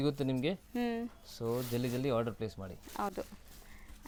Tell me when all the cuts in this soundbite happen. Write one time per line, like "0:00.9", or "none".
none